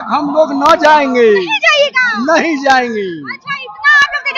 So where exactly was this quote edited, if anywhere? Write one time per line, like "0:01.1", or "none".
none